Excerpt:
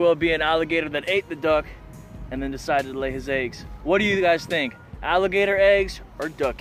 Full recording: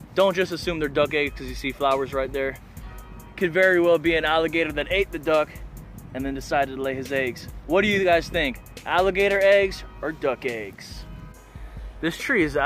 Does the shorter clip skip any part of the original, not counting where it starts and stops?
no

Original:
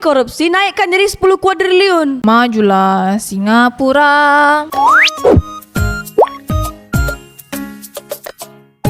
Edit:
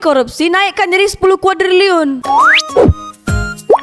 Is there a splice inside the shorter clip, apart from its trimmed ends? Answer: yes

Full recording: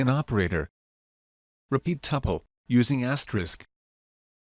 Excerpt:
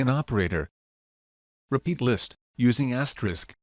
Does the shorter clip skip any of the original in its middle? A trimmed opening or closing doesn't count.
yes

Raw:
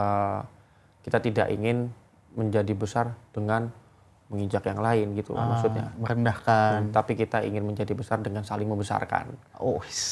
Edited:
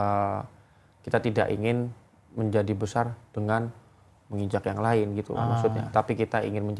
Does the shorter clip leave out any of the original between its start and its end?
yes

